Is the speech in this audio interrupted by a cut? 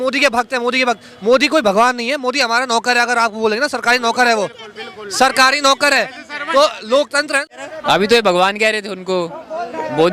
yes; 1 cut; at 7.4 s

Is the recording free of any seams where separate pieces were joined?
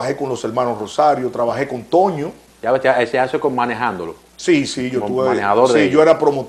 yes; 0 cuts

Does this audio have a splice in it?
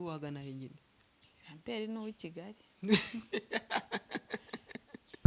no; 0 cuts

